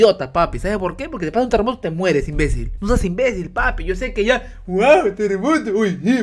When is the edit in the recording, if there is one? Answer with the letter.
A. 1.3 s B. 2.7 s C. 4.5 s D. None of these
B